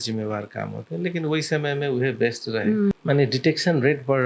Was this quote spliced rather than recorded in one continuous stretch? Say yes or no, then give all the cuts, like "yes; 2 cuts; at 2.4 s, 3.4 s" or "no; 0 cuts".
yes; 1 cut; at 2.9 s